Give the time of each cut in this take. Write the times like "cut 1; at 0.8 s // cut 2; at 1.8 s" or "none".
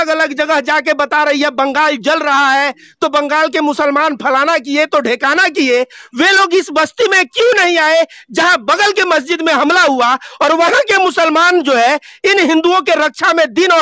none